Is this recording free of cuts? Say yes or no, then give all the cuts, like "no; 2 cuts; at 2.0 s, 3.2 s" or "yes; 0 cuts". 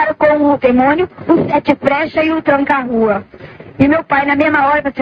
yes; 0 cuts